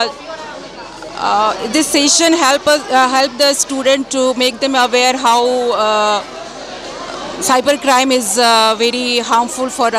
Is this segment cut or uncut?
uncut